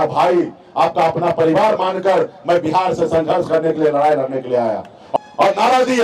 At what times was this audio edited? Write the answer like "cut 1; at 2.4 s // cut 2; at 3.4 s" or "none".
cut 1; at 5.0 s